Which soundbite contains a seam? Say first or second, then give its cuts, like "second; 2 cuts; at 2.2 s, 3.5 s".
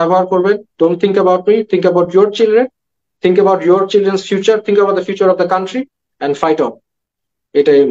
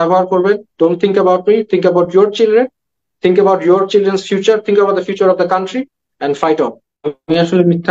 second; 1 cut; at 6.9 s